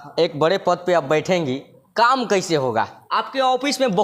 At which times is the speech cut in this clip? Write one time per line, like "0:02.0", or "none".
0:03.0